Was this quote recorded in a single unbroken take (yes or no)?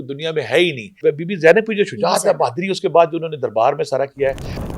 no